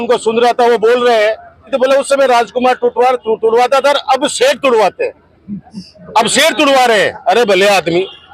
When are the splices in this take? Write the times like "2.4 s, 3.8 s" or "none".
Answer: 1.7 s